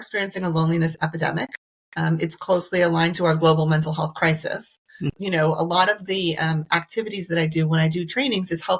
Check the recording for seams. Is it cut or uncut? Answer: cut